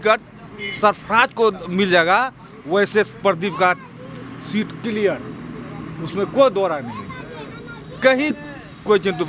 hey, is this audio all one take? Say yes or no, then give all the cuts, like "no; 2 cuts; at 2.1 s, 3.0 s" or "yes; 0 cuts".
yes; 0 cuts